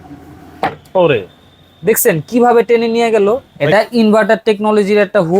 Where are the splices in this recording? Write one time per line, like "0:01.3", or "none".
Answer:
0:03.5